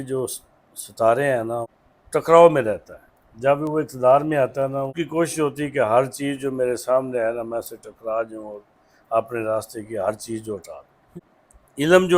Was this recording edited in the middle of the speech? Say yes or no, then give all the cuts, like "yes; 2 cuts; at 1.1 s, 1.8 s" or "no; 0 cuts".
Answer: yes; 3 cuts; at 1.8 s, 5.0 s, 11.1 s